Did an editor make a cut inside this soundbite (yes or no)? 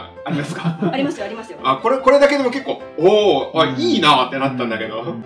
no